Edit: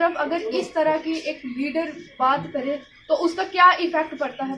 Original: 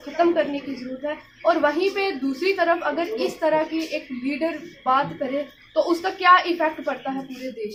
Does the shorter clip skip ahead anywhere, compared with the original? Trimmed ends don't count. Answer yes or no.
no